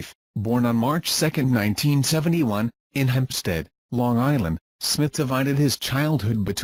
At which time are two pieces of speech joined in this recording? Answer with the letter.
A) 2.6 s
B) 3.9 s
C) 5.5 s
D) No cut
D